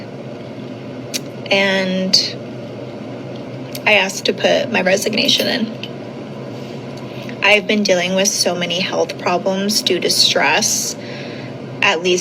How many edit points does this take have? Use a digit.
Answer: 0